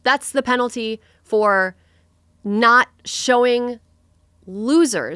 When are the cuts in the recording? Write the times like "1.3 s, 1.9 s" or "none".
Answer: none